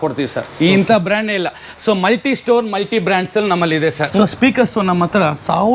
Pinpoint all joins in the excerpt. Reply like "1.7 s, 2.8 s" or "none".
4.0 s